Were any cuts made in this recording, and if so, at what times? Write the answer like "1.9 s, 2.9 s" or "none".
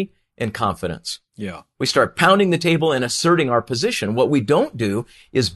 1.6 s